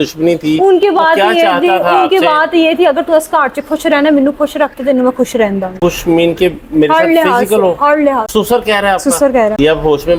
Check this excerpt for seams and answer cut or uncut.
uncut